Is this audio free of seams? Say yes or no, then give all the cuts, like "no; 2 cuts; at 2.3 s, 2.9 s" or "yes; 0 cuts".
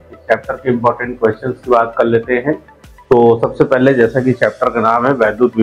yes; 0 cuts